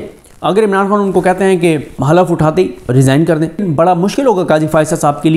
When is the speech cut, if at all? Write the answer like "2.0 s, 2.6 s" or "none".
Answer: 1.9 s, 2.9 s, 3.6 s